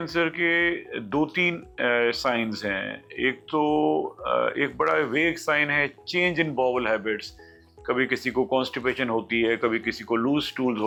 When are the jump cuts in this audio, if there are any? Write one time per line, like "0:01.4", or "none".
none

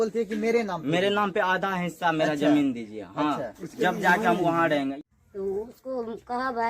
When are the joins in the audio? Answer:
0:05.0

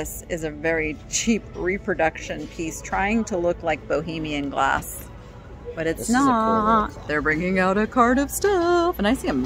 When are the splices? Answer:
0:07.0

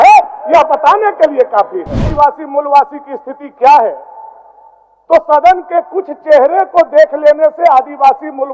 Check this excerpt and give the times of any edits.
0:02.1

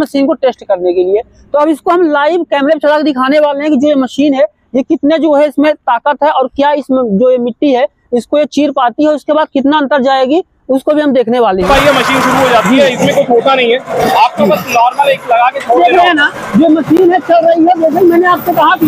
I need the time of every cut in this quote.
0:11.7
0:15.8

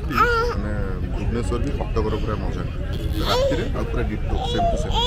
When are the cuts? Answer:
none

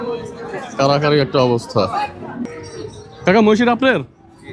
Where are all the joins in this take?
0:02.5

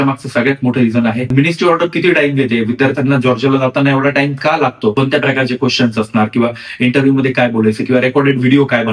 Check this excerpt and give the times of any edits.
0:01.3
0:04.9

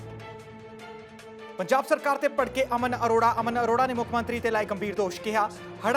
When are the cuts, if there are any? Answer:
0:01.6

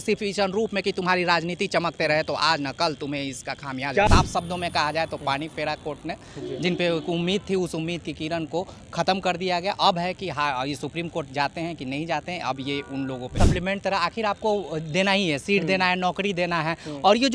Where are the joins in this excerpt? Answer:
0:04.1
0:13.4

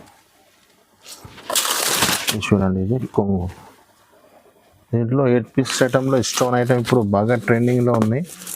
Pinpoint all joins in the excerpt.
0:05.7

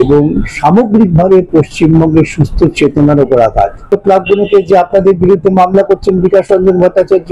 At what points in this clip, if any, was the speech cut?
0:03.9

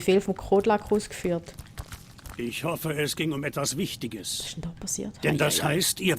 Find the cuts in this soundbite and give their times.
none

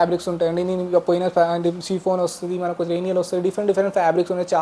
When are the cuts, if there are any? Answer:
none

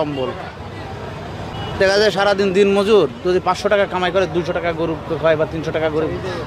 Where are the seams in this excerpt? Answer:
none

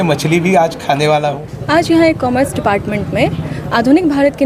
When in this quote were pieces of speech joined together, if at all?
0:01.5

